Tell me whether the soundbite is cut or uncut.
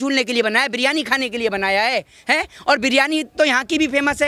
uncut